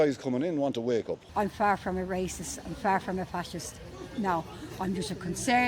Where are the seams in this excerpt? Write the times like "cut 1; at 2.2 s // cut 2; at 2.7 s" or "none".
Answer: cut 1; at 1.2 s